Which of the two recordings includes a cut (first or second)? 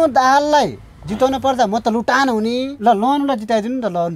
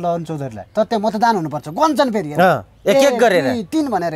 first